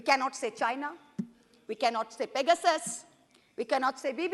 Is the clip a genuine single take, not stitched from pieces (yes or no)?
yes